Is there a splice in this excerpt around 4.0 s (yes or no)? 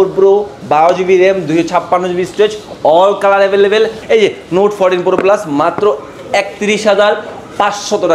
yes